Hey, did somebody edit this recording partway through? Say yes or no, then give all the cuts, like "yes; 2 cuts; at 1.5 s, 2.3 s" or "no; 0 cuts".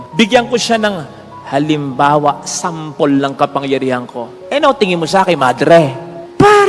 no; 0 cuts